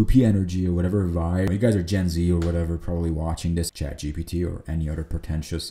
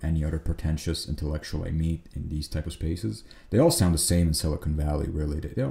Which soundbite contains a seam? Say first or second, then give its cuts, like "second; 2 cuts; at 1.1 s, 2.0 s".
first; 2 cuts; at 1.5 s, 3.7 s